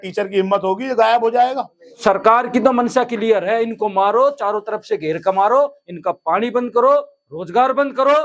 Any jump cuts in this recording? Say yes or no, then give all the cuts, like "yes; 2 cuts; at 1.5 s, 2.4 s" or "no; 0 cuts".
yes; 1 cut; at 2.0 s